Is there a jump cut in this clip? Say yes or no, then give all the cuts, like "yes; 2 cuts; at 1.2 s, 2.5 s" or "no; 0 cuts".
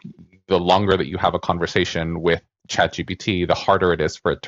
no; 0 cuts